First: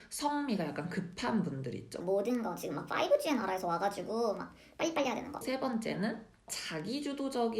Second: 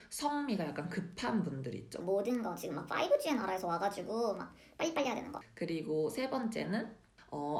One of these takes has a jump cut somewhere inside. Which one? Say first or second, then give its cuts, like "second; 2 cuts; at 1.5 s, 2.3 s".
first; 2 cuts; at 5.4 s, 6.6 s